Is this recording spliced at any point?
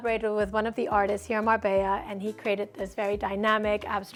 no; 0 cuts

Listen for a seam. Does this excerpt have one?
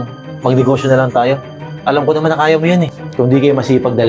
yes; 1 cut; at 3.0 s

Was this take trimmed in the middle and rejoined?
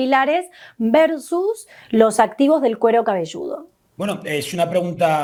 no; 0 cuts

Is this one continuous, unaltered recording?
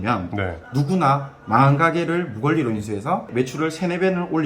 no; 1 cut; at 3.3 s

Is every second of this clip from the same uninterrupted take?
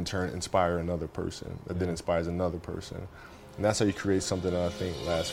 yes; 0 cuts

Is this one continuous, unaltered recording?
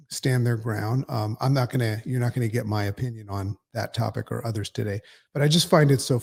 yes; 0 cuts

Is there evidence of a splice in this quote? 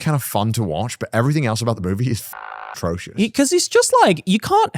no; 0 cuts

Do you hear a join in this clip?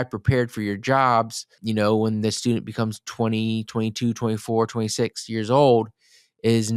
yes; 1 cut; at 1.5 s

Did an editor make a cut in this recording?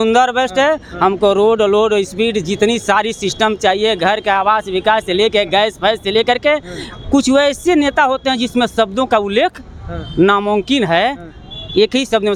no; 0 cuts

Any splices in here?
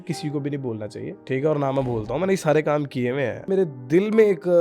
yes; 2 cuts; at 1.2 s, 3.5 s

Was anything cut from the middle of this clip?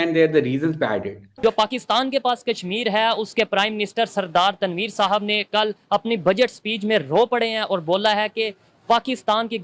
yes; 1 cut; at 1.3 s

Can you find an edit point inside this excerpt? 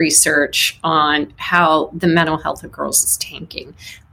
no; 0 cuts

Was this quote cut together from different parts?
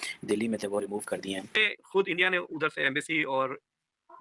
yes; 1 cut; at 1.7 s

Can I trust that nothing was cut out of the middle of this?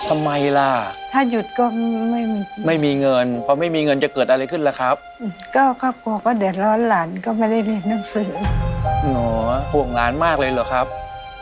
yes; 0 cuts

